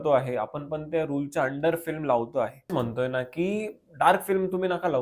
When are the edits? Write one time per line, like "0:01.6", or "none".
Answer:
0:02.7